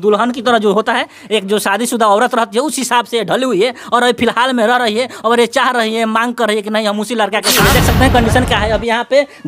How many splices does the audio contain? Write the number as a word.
one